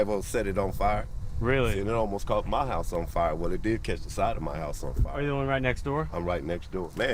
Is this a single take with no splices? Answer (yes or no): yes